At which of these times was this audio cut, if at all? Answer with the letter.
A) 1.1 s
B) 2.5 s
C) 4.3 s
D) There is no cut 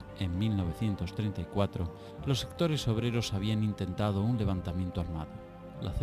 C